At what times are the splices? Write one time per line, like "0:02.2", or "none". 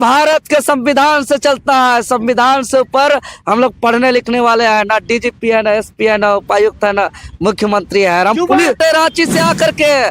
0:08.8